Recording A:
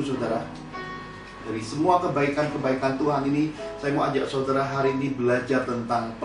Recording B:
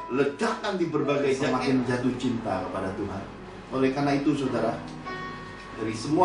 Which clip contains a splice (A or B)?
B